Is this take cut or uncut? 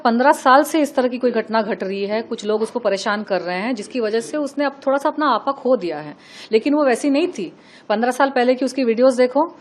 uncut